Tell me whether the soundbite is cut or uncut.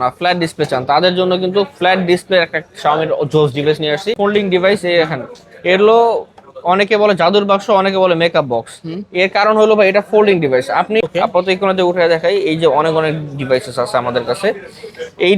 cut